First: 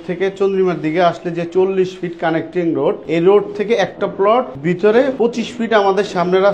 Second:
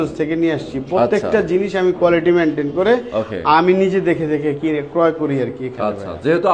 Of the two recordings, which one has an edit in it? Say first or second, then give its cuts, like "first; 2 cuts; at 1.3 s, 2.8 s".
first; 3 cuts; at 3.0 s, 4.5 s, 5.1 s